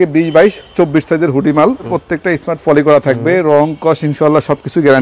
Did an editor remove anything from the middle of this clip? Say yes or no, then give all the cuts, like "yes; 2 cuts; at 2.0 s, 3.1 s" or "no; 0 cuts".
yes; 1 cut; at 2.0 s